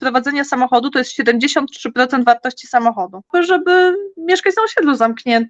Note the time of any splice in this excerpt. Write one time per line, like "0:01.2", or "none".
0:03.3